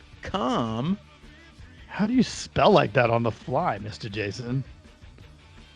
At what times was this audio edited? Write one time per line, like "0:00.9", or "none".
0:04.7